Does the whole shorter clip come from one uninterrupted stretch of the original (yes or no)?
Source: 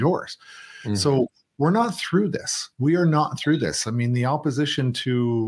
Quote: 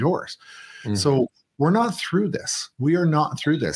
yes